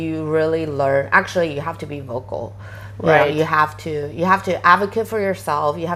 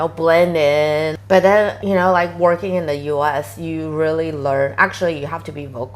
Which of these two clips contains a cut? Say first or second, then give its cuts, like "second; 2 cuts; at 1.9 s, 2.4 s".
second; 1 cut; at 1.1 s